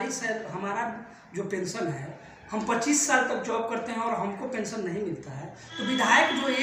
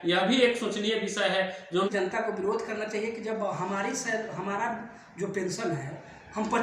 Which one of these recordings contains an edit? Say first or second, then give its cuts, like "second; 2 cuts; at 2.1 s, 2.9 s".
second; 1 cut; at 1.9 s